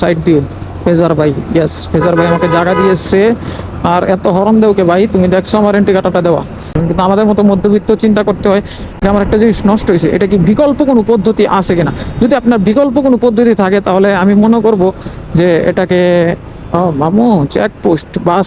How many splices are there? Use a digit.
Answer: 1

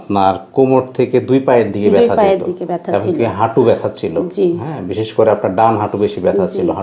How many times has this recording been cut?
0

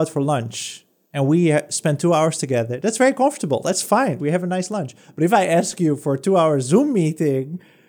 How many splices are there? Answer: 0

